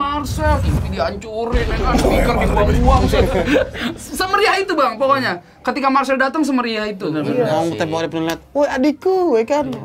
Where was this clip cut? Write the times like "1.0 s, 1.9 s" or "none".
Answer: 7.1 s